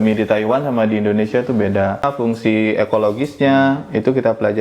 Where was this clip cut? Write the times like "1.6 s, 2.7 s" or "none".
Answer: 2.1 s